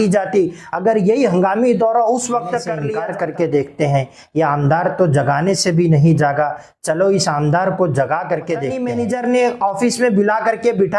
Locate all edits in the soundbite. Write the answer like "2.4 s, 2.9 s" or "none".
2.8 s, 8.7 s